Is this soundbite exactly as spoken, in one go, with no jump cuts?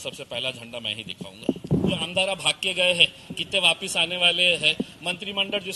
no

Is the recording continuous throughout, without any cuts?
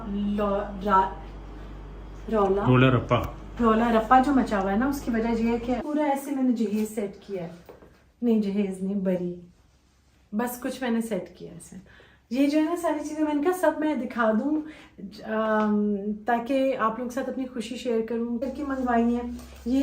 no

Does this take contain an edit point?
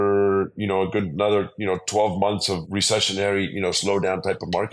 yes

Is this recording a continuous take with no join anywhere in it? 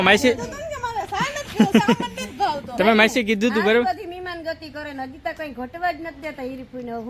yes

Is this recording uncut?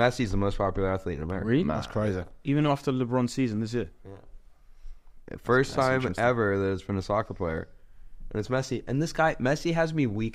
yes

